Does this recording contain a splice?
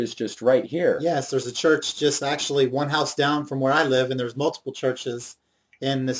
no; 0 cuts

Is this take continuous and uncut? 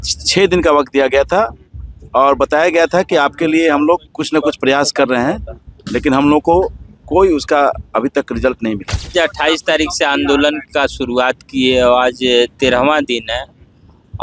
no; 1 cut; at 9.1 s

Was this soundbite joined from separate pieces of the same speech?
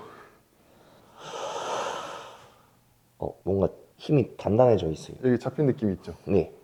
no; 0 cuts

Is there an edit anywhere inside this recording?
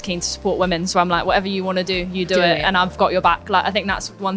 no; 0 cuts

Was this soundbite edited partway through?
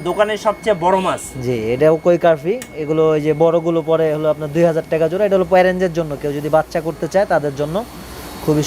no; 0 cuts

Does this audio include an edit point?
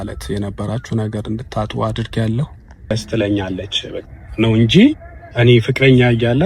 yes; 1 cut; at 2.8 s

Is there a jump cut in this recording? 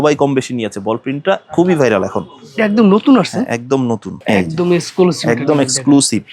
yes; 1 cut; at 4.1 s

